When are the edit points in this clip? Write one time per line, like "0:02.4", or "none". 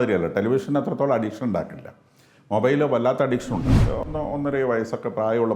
0:03.8